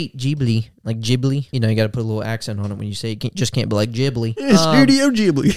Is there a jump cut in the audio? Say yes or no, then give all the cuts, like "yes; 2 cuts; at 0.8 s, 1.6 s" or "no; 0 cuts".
yes; 2 cuts; at 1.5 s, 4.5 s